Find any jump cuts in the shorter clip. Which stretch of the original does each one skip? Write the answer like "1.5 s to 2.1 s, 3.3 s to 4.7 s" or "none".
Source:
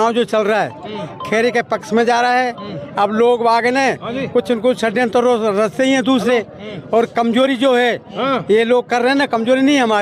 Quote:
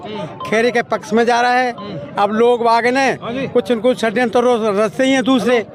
none

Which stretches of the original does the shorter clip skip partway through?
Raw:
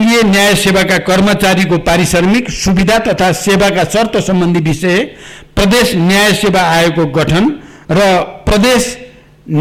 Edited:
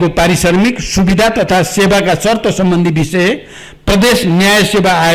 none

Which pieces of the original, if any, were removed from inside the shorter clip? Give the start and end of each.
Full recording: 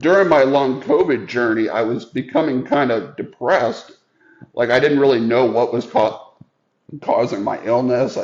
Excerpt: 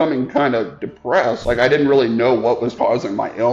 3.8 s to 4.5 s, 5.9 s to 7.0 s

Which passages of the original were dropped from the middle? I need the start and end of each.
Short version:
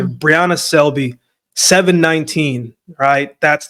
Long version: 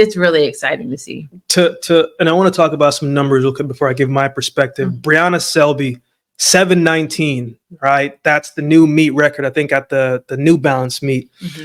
none

